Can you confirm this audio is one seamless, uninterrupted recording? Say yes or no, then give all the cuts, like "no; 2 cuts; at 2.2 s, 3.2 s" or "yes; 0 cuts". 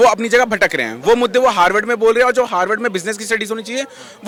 yes; 0 cuts